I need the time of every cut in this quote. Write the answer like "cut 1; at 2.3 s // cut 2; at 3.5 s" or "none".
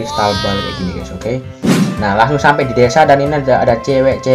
cut 1; at 1.6 s